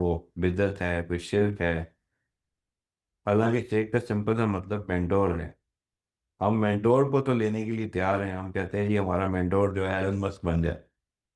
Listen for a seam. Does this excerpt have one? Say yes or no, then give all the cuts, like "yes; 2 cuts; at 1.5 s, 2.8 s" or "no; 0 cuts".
no; 0 cuts